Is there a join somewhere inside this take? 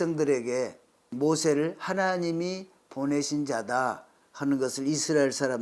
yes; 1 cut; at 1.1 s

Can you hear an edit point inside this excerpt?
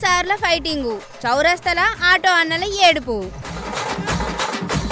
no; 0 cuts

